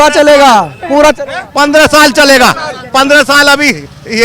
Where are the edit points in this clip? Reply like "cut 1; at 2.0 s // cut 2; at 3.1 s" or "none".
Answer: none